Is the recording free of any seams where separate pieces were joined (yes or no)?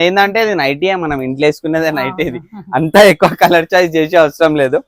yes